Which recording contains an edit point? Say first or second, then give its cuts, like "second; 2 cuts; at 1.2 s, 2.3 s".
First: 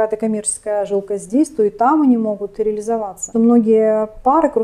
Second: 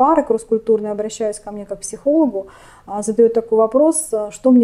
first; 1 cut; at 3.2 s